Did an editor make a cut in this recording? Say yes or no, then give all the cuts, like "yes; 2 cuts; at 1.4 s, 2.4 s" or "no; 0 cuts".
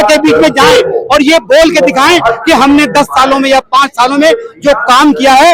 no; 0 cuts